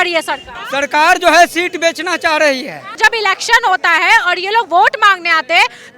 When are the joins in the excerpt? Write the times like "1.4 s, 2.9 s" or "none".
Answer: 2.8 s